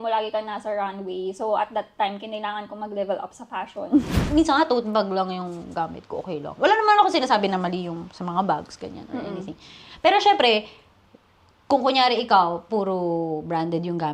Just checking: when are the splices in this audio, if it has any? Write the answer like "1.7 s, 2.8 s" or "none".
4.2 s